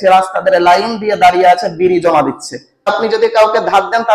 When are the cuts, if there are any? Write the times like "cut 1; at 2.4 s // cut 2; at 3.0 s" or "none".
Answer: cut 1; at 2.9 s